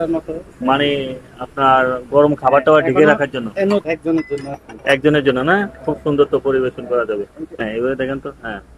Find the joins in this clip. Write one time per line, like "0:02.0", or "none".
0:03.8
0:07.6